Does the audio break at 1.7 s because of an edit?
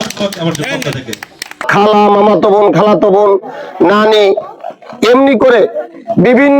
yes; 1 cut; at 1.7 s

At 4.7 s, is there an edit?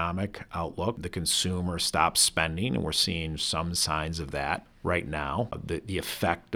yes; 3 cuts; at 1.0 s, 4.7 s, 5.6 s

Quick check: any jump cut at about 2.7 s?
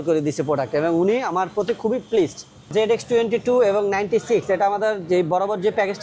yes; 1 cut; at 2.7 s

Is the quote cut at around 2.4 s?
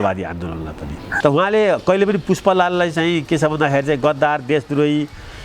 no; 1 cut; at 1.0 s

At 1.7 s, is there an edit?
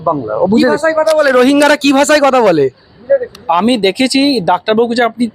no; 1 cut; at 3.4 s

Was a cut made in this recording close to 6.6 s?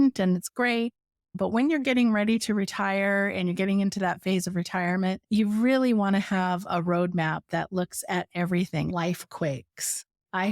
no; 1 cut; at 8.9 s

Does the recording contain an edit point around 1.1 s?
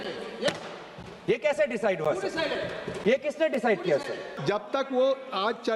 no; 1 cut; at 4.3 s

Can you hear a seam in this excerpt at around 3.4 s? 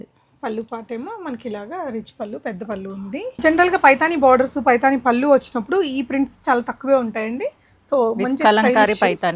yes; 1 cut; at 3.4 s

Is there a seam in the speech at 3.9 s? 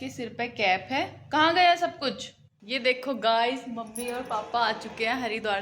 no; 1 cut; at 2.7 s

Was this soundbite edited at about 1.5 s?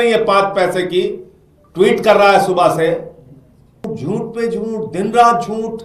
no; 1 cut; at 3.9 s

